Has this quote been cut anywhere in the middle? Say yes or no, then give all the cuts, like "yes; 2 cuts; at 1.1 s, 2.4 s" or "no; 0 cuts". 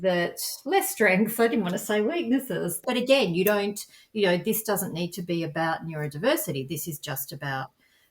yes; 1 cut; at 2.8 s